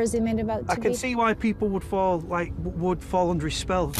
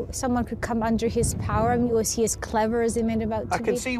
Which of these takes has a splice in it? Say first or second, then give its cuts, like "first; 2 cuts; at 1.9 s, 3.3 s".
second; 1 cut; at 1.9 s